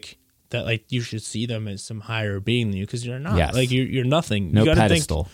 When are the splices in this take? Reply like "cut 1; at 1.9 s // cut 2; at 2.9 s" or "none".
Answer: none